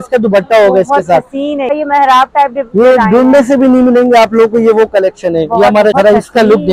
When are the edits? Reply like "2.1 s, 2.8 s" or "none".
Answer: 1.7 s, 5.9 s